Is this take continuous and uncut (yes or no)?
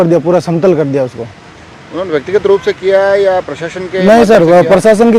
yes